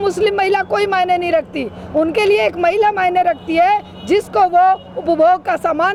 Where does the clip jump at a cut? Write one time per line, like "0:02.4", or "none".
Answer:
none

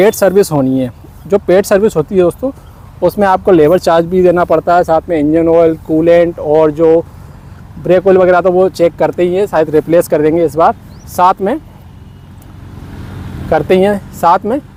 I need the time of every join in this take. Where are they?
none

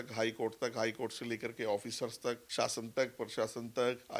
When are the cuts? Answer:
0:02.4

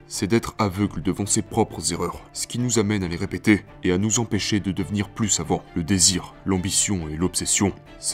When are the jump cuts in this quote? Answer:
0:05.7

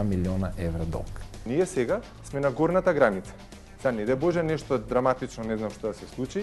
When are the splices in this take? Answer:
0:01.4

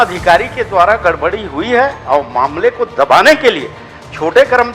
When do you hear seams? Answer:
none

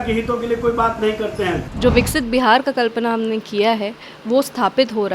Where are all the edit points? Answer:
0:01.7

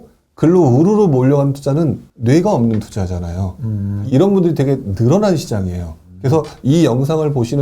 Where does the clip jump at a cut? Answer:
0:02.1
0:03.9

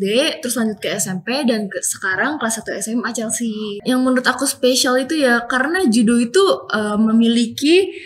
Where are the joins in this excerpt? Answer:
0:03.7

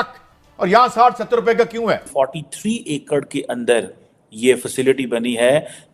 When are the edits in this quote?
0:02.1

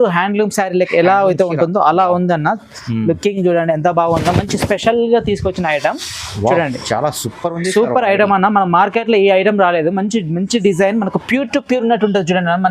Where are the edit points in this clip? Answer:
none

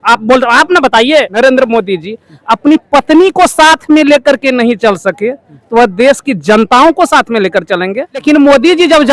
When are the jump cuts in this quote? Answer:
0:01.3
0:08.2

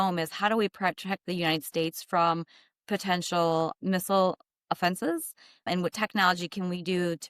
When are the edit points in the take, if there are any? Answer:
0:03.8
0:05.7

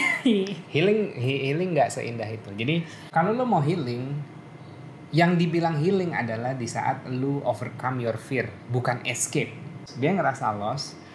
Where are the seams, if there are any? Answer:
0:03.0
0:09.8

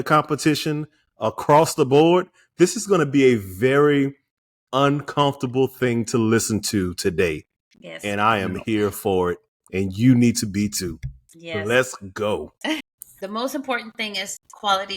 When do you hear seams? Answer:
0:13.0

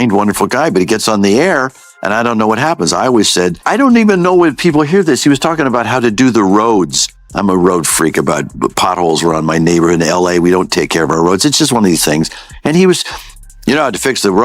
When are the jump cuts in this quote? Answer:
0:03.6

